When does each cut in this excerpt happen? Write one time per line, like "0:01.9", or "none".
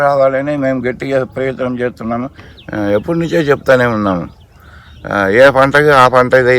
0:02.4